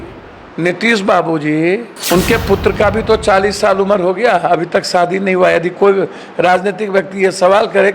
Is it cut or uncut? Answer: cut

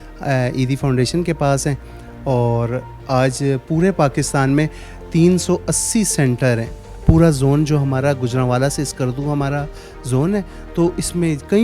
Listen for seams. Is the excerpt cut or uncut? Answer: cut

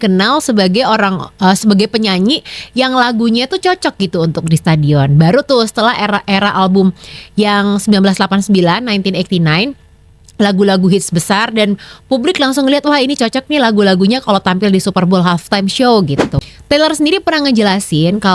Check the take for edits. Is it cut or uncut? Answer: cut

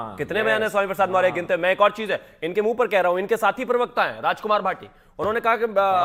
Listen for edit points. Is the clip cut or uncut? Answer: uncut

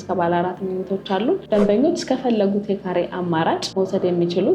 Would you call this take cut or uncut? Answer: cut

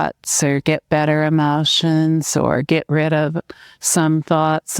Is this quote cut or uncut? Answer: uncut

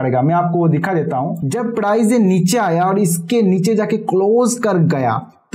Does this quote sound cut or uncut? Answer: cut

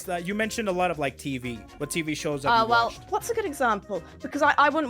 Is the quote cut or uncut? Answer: cut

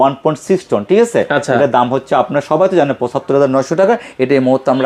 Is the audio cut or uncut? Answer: uncut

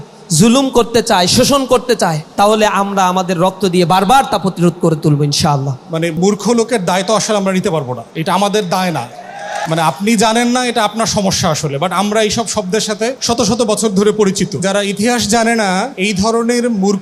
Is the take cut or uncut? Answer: cut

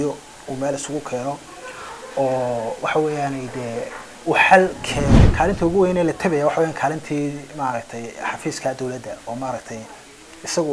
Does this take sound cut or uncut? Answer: cut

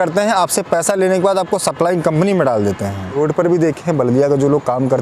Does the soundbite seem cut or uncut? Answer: cut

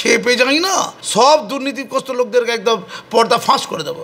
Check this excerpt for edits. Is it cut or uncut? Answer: cut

